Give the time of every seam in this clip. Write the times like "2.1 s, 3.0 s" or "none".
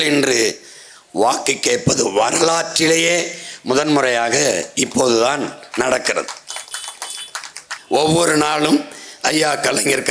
7.7 s